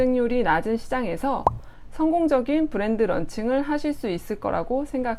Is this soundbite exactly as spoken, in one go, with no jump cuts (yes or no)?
yes